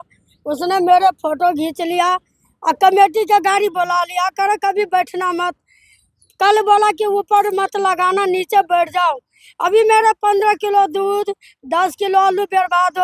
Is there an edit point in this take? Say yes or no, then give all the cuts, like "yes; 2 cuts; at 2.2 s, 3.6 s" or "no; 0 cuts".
no; 0 cuts